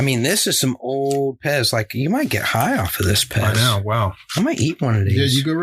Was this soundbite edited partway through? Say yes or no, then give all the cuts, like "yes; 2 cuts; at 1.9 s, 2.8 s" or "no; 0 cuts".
yes; 1 cut; at 4.2 s